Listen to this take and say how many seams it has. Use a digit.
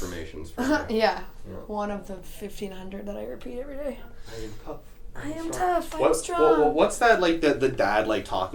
0